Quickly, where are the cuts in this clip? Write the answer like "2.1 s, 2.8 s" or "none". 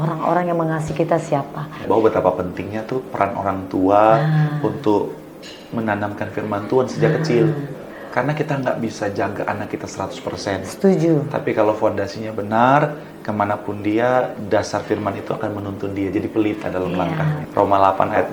1.8 s, 17.4 s

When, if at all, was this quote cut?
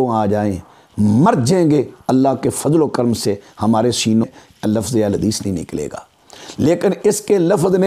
4.3 s

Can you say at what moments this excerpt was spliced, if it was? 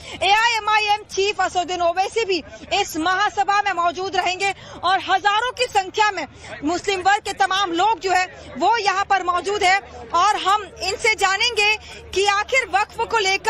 4.7 s

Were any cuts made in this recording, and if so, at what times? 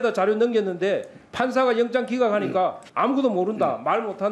2.8 s

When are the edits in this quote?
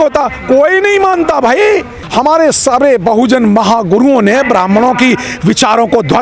2.0 s

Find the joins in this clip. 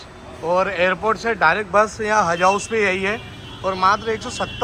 none

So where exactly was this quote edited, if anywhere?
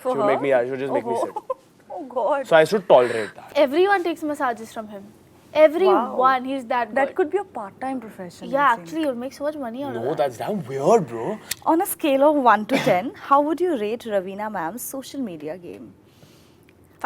3.4 s, 11.4 s

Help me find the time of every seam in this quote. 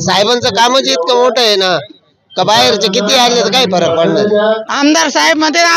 4.6 s

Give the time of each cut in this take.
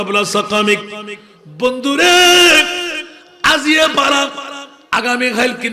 none

